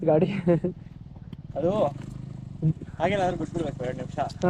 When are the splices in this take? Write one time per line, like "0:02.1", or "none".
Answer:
none